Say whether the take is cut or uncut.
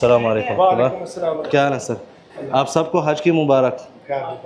uncut